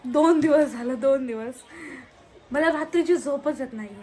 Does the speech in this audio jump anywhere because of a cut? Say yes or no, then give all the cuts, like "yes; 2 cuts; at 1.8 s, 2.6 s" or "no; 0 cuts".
no; 0 cuts